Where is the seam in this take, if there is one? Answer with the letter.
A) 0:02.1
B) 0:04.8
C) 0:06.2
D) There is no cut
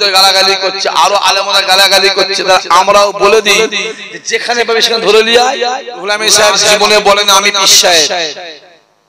C